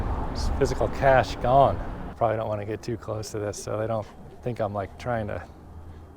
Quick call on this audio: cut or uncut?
uncut